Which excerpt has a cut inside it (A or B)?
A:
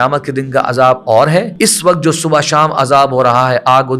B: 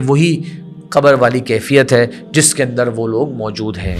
A